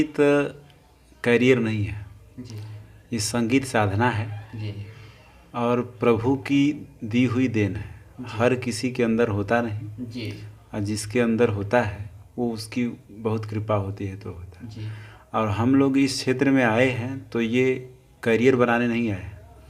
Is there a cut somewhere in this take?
no; 0 cuts

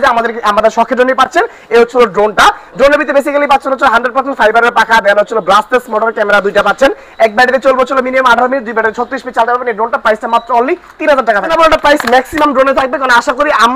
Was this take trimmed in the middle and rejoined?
yes; 1 cut; at 11.5 s

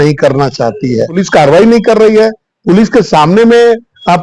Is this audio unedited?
no; 1 cut; at 1.2 s

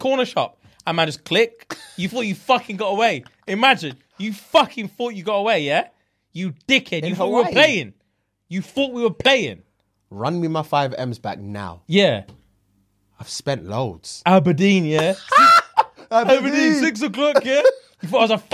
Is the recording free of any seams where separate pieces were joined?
yes; 0 cuts

